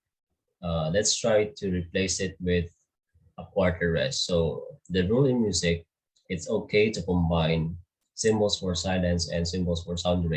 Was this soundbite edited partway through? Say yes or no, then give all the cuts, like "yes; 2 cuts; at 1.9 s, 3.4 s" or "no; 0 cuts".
no; 0 cuts